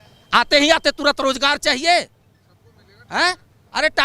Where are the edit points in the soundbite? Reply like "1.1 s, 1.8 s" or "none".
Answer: none